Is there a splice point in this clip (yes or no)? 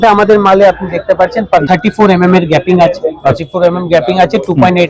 yes